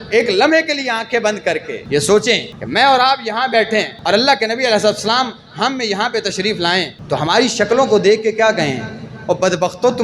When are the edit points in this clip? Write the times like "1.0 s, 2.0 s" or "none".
1.7 s, 2.5 s, 3.9 s, 7.0 s